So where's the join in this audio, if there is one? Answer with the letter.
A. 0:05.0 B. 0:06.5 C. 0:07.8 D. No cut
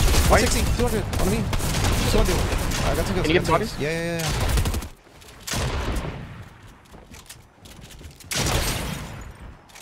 A